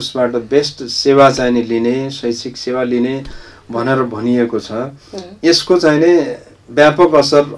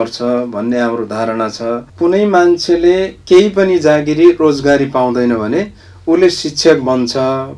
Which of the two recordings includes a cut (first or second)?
second